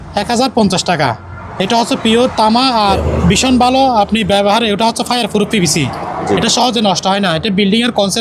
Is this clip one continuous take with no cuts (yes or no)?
no